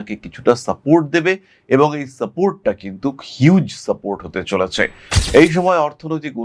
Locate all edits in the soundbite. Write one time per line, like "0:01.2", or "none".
0:05.0